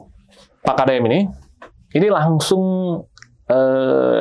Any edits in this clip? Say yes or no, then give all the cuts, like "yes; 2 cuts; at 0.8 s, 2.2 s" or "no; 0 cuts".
no; 0 cuts